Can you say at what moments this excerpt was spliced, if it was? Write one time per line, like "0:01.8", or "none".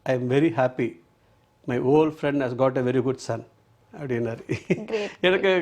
none